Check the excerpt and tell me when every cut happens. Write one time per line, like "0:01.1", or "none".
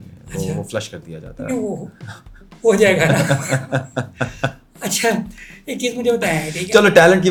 none